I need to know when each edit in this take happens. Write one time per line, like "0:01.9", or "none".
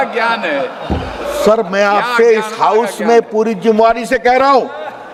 none